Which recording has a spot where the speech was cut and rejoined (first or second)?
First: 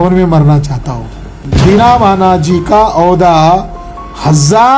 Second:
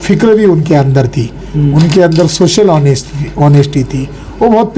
first